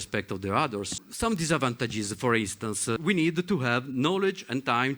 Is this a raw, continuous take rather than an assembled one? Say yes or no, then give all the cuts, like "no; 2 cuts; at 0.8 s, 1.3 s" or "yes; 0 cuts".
no; 2 cuts; at 0.9 s, 3.0 s